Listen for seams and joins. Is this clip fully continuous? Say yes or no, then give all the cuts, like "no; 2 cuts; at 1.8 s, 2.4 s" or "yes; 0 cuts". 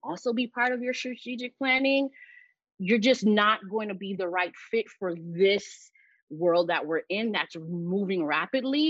yes; 0 cuts